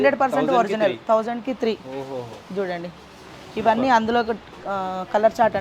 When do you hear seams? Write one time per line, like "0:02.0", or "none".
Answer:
none